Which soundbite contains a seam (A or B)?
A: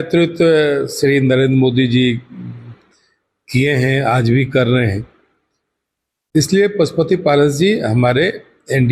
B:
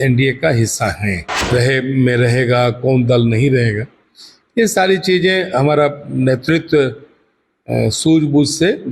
B